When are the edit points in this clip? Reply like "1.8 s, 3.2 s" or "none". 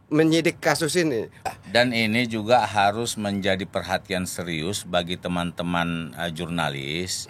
1.4 s